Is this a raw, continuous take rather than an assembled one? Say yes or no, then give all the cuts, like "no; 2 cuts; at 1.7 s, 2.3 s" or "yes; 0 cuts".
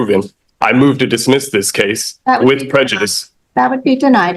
yes; 0 cuts